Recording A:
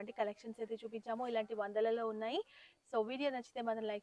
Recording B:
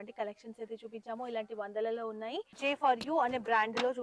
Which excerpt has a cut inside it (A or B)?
B